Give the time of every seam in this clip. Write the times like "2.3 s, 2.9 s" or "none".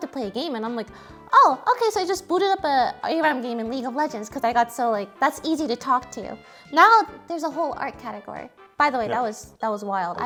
none